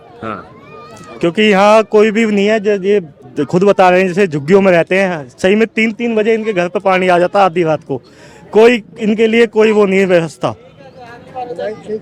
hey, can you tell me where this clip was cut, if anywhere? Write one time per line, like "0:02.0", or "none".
none